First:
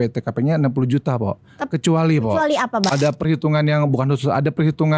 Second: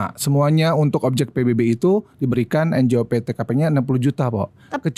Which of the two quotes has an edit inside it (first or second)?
first